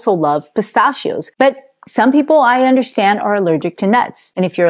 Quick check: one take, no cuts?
yes; 0 cuts

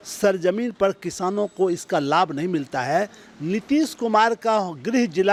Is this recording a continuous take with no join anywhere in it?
yes; 0 cuts

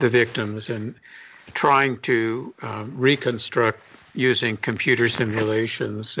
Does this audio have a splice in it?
no; 0 cuts

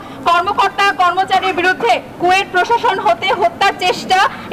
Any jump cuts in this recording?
no; 0 cuts

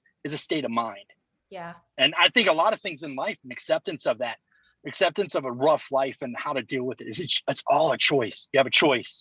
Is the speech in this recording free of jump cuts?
yes; 0 cuts

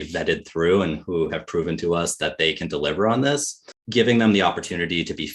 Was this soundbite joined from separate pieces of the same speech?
yes; 1 cut; at 3.6 s

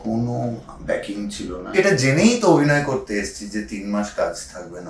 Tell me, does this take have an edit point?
yes; 1 cut; at 1.8 s

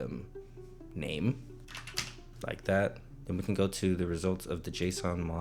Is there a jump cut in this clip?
yes; 2 cuts; at 1.5 s, 3.1 s

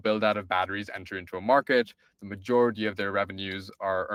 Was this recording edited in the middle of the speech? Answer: no; 0 cuts

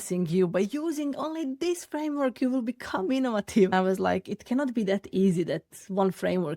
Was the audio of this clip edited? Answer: yes; 1 cut; at 3.7 s

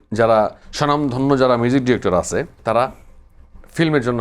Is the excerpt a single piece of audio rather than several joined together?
no; 1 cut; at 2.5 s

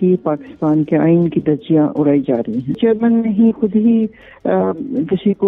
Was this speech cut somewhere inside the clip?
yes; 1 cut; at 2.8 s

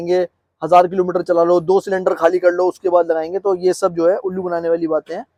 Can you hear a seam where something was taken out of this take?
no; 0 cuts

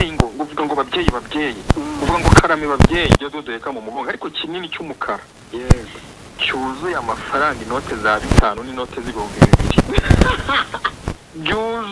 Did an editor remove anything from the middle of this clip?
yes; 1 cut; at 3.2 s

